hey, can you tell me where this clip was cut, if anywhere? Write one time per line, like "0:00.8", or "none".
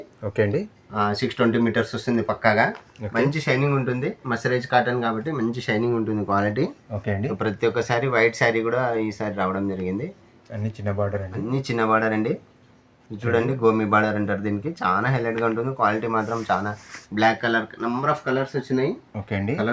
none